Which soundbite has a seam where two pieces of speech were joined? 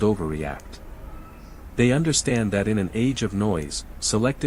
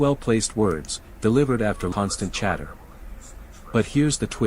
second; 1 cut; at 1.9 s

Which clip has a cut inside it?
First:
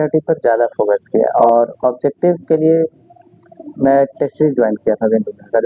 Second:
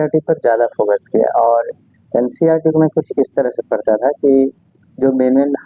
first; 1 cut; at 1.4 s

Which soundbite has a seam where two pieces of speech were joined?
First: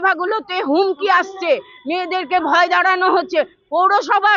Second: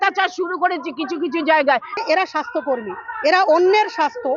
second; 1 cut; at 1.9 s

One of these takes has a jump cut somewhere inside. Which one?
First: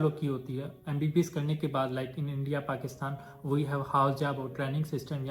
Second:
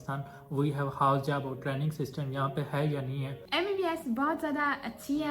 second; 1 cut; at 3.4 s

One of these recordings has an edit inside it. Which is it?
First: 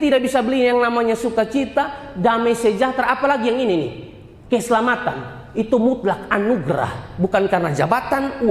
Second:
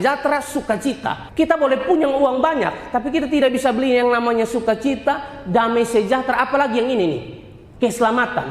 second; 1 cut; at 1.2 s

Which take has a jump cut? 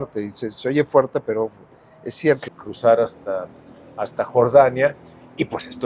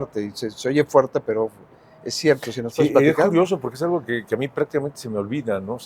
first; 1 cut; at 2.6 s

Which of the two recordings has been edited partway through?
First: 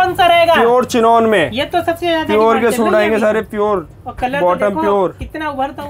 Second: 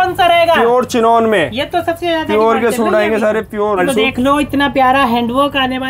second; 1 cut; at 3.9 s

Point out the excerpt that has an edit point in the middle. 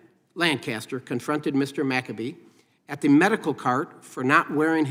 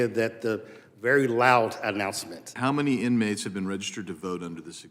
second; 1 cut; at 2.5 s

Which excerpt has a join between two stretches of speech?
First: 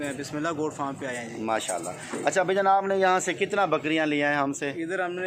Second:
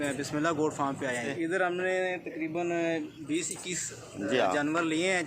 second; 1 cut; at 1.3 s

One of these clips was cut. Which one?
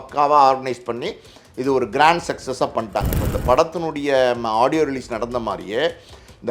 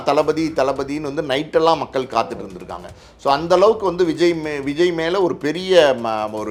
first; 1 cut; at 3.1 s

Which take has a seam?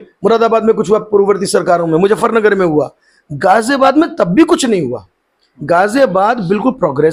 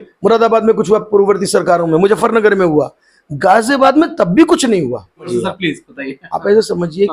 second; 1 cut; at 5.3 s

